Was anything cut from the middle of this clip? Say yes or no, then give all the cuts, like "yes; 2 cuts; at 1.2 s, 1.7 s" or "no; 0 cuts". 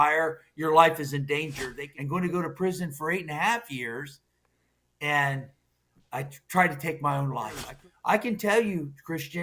yes; 2 cuts; at 1.7 s, 7.7 s